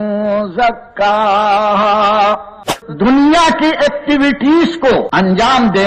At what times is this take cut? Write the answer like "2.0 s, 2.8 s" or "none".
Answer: 2.8 s, 5.1 s

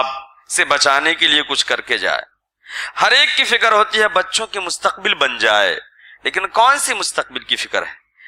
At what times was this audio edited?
none

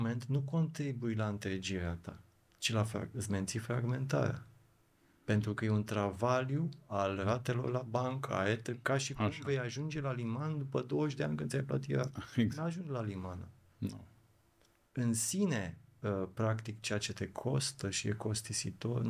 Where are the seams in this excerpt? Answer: none

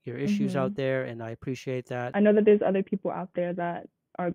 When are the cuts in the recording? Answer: 2.1 s

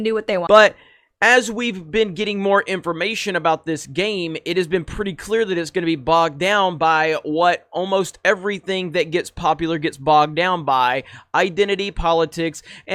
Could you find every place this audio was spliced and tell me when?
none

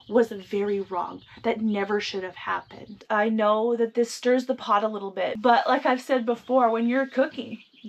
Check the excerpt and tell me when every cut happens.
2.9 s

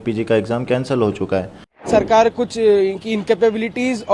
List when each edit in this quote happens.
1.8 s

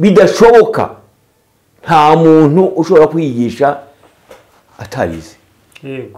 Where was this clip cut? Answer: none

